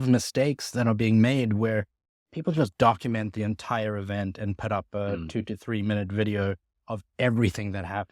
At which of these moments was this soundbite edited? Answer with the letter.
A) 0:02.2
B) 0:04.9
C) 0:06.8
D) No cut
D